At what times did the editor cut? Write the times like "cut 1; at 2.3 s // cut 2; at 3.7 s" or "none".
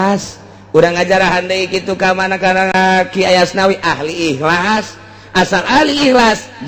cut 1; at 2.7 s